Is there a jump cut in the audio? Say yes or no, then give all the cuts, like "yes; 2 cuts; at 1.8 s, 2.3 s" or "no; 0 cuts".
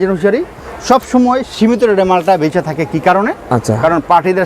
no; 0 cuts